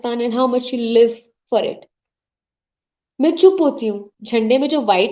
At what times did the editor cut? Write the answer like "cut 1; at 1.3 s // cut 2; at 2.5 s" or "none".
cut 1; at 4.1 s

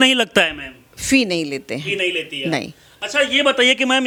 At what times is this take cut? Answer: none

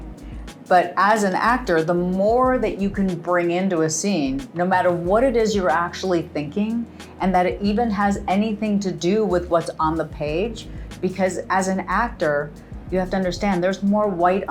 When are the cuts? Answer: none

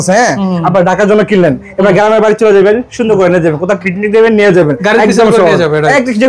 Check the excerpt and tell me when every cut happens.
none

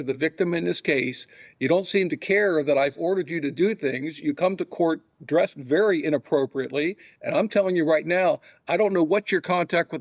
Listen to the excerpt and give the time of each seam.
none

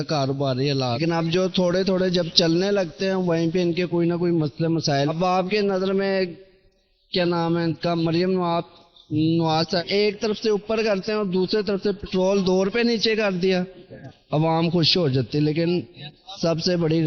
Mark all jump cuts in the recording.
cut 1; at 1.0 s // cut 2; at 5.1 s // cut 3; at 9.8 s

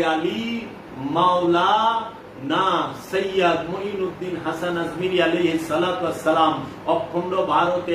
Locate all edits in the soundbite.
none

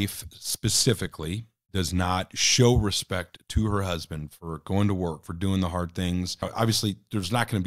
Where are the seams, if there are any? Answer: cut 1; at 1.5 s // cut 2; at 6.5 s

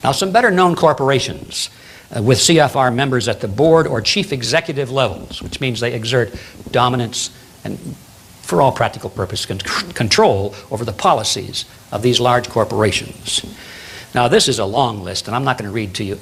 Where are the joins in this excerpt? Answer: none

